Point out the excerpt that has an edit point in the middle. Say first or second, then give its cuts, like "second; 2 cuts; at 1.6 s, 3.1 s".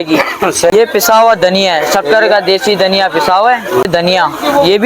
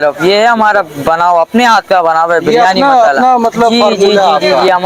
first; 2 cuts; at 0.7 s, 3.8 s